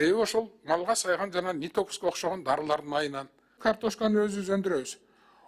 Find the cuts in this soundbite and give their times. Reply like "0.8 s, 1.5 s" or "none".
3.6 s